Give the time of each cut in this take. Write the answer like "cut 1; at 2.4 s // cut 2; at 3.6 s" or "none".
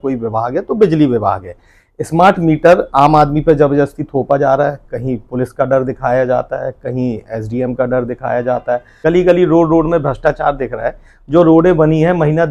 cut 1; at 8.9 s